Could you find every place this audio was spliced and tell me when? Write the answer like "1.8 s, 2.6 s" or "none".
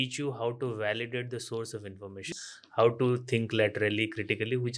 2.3 s